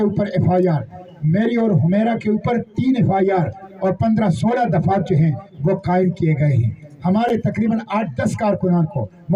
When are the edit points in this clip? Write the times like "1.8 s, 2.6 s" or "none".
none